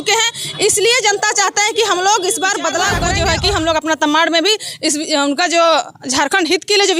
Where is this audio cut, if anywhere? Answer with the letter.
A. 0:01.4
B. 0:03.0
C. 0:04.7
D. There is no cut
B